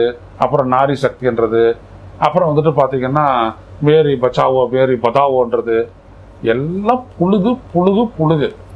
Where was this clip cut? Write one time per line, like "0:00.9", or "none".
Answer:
none